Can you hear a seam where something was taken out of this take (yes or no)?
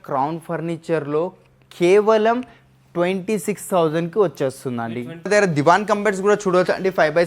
yes